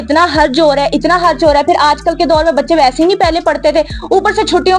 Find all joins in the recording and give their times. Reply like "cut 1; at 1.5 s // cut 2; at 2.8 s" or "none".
none